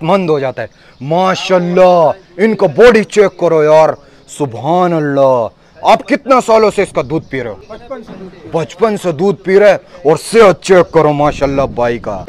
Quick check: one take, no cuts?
yes; 0 cuts

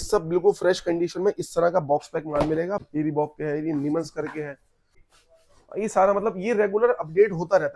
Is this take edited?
yes; 2 cuts; at 2.8 s, 5.0 s

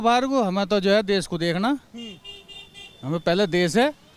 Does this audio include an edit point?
no; 0 cuts

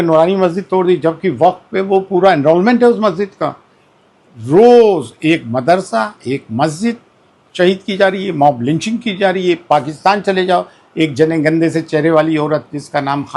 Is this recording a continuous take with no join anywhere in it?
yes; 0 cuts

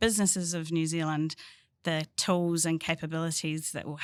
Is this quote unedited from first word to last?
yes; 0 cuts

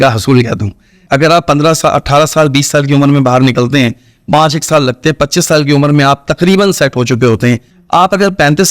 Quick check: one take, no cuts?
no; 2 cuts; at 1.0 s, 7.7 s

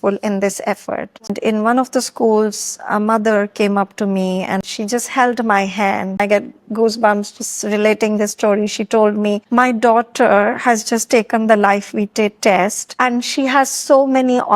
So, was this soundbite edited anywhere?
yes; 3 cuts; at 1.3 s, 4.6 s, 6.2 s

